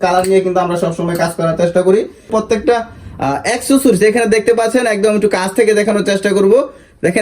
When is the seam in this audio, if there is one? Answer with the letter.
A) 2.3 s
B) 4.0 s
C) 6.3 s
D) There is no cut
A